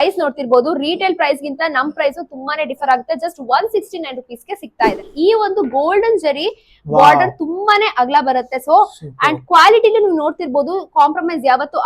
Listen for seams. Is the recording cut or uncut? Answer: cut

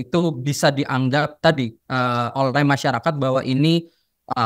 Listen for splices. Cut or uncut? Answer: uncut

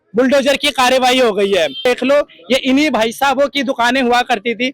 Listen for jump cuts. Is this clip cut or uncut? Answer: cut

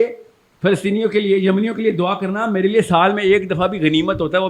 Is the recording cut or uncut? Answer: uncut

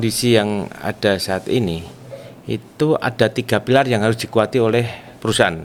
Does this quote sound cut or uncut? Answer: uncut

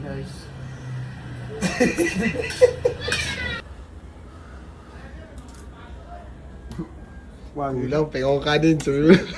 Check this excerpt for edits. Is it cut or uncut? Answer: cut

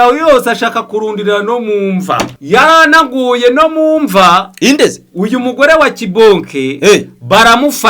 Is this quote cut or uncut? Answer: cut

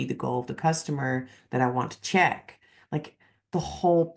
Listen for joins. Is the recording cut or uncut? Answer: uncut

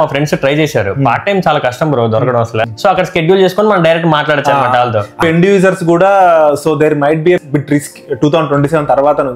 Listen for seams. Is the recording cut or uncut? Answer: cut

